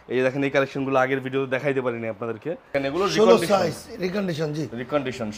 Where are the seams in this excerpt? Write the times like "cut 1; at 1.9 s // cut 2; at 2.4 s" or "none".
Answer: cut 1; at 2.8 s